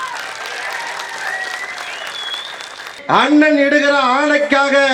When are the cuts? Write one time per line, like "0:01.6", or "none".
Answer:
0:02.9